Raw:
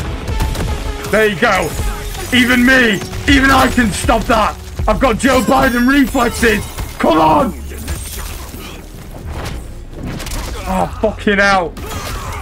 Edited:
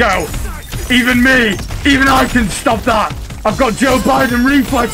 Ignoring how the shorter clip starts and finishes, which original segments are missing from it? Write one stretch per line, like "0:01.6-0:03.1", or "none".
none